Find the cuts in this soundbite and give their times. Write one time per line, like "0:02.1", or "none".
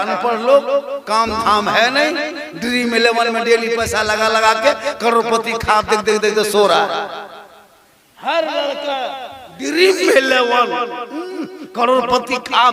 none